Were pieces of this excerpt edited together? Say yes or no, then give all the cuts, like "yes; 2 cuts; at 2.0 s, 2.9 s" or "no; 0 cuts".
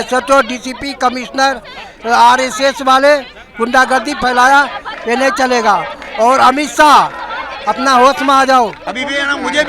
yes; 1 cut; at 8.8 s